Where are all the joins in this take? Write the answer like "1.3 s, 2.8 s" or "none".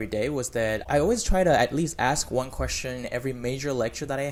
none